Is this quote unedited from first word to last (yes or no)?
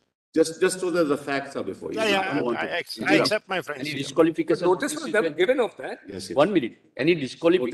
yes